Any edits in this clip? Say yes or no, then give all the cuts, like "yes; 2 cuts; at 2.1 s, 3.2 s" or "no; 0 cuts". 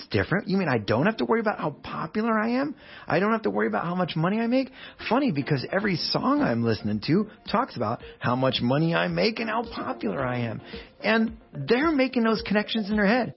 no; 0 cuts